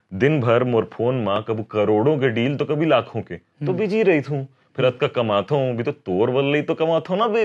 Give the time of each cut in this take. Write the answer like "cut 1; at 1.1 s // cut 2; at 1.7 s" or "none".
none